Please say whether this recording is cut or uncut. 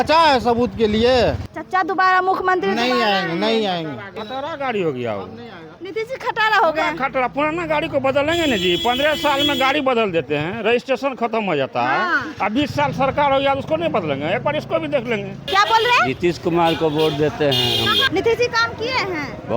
cut